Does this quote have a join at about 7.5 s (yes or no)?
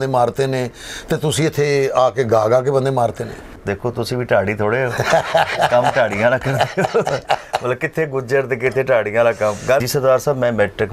no